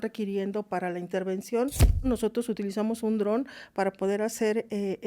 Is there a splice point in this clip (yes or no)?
yes